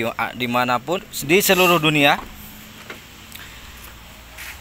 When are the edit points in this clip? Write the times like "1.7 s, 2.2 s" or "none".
1.1 s